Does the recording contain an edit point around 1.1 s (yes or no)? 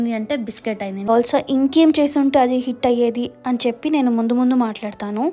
yes